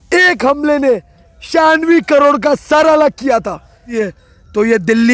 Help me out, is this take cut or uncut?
cut